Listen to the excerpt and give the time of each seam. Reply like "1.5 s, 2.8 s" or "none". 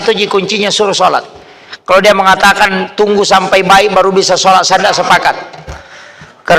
none